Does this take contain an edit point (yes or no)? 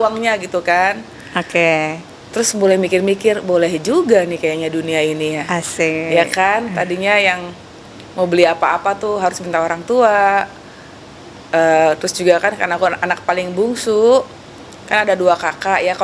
no